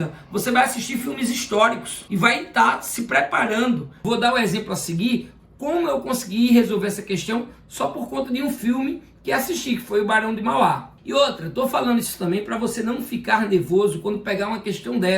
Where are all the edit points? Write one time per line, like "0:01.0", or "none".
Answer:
0:04.0